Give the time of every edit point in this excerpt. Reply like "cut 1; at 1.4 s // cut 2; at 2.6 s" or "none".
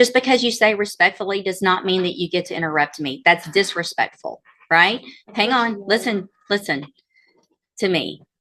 none